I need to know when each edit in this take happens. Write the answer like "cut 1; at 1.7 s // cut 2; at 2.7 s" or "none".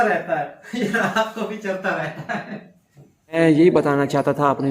cut 1; at 3.4 s

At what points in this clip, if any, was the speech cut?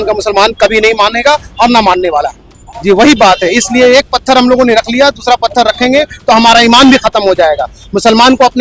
none

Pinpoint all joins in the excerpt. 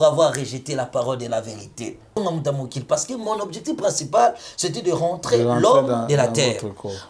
cut 1; at 2.2 s

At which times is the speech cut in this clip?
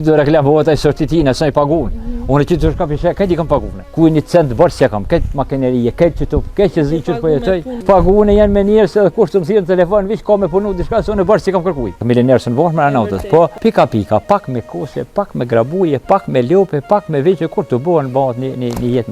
cut 1; at 3.8 s // cut 2; at 7.7 s // cut 3; at 12.0 s // cut 4; at 13.6 s

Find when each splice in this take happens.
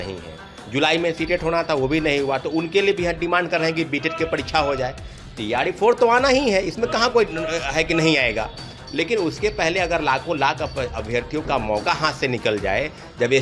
none

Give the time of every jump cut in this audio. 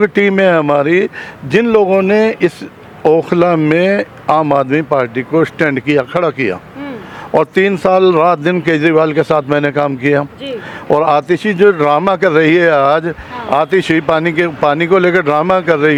none

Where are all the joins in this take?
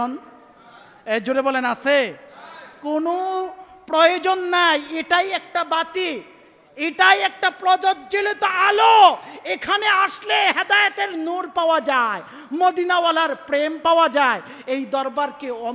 none

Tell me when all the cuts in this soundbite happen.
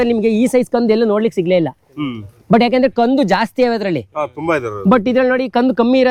none

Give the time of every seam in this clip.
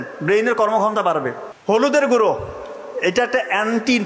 cut 1; at 1.4 s

